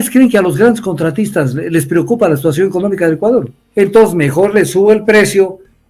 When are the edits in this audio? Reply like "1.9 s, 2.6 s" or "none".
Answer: 3.6 s